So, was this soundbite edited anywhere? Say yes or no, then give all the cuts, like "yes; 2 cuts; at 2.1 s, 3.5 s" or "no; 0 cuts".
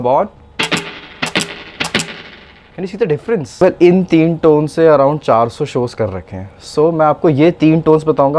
yes; 1 cut; at 3.6 s